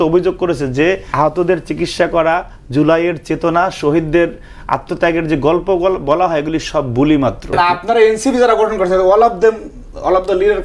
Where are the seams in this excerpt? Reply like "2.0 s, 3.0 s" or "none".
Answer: 1.0 s, 7.5 s